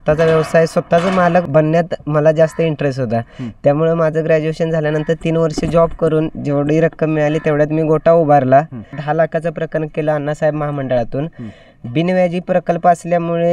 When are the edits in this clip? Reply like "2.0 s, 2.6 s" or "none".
1.5 s, 9.0 s